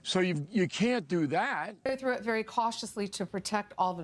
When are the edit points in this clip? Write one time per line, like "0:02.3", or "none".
0:01.9